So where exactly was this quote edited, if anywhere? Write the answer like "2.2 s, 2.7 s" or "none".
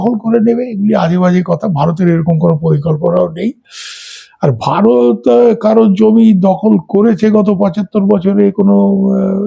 none